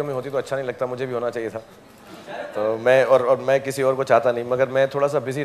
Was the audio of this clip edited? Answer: no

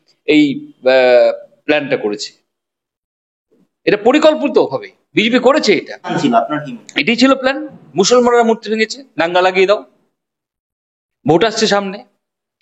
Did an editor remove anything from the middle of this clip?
yes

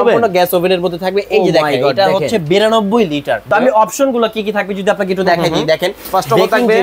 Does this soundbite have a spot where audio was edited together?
yes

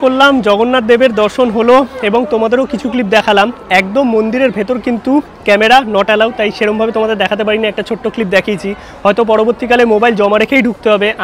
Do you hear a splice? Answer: no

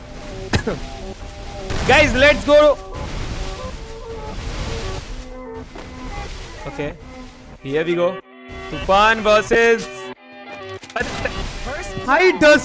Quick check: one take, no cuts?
yes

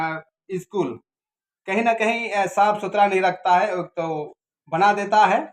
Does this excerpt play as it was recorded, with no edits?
yes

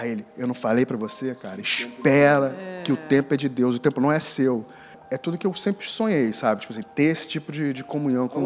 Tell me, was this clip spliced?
yes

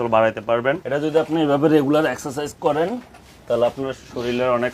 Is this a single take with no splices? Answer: no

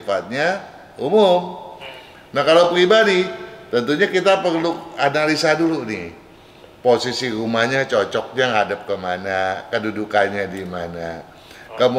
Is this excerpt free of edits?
yes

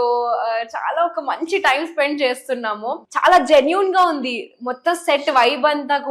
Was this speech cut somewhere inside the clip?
yes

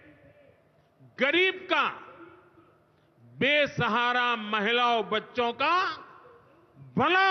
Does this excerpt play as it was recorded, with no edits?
yes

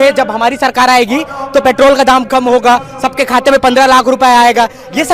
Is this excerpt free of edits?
yes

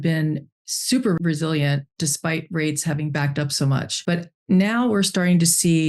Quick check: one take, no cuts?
no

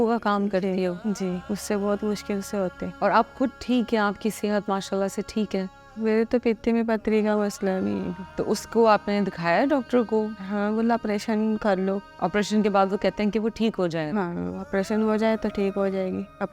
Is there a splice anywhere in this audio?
yes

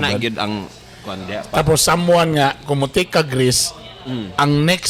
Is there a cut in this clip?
no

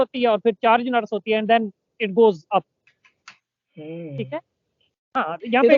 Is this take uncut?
yes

